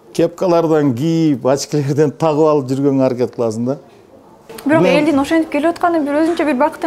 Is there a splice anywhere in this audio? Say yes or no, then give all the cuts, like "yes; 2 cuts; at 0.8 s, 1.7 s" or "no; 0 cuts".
no; 0 cuts